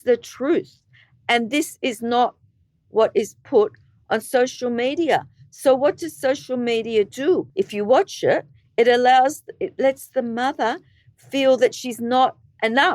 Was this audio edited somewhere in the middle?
yes; 1 cut; at 7.5 s

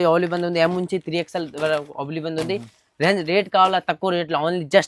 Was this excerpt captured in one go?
yes; 0 cuts

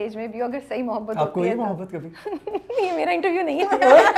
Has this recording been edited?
no; 0 cuts

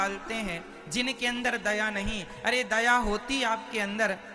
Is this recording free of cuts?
yes; 0 cuts

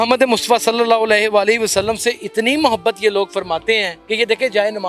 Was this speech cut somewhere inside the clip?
yes; 1 cut; at 4.0 s

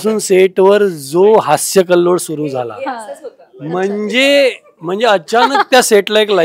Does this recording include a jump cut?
no; 0 cuts

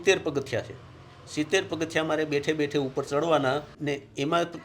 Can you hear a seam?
yes; 1 cut; at 3.7 s

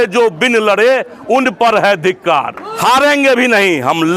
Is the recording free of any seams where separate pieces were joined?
no; 1 cut; at 2.6 s

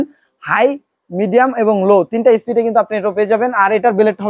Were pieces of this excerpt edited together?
no; 0 cuts

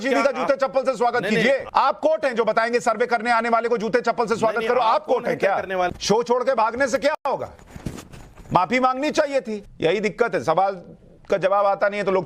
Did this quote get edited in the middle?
yes; 3 cuts; at 1.7 s, 5.9 s, 9.6 s

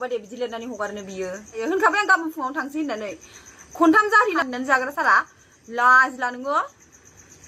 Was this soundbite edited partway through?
yes; 2 cuts; at 1.6 s, 4.5 s

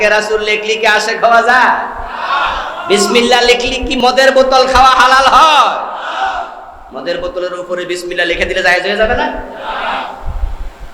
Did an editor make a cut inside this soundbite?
yes; 1 cut; at 4.0 s

